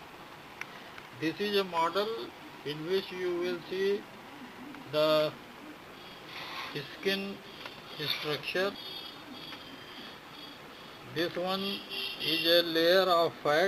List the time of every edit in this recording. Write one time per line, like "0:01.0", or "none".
0:08.8